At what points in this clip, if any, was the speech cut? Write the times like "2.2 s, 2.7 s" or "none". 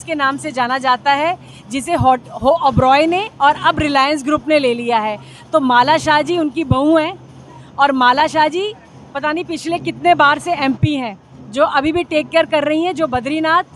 none